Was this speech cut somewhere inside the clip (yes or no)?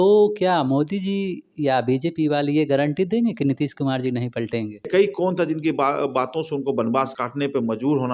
yes